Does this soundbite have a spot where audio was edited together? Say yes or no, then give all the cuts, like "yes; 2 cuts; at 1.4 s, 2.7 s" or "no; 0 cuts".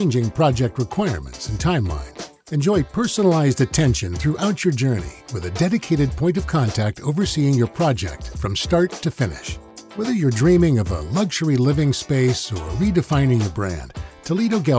no; 0 cuts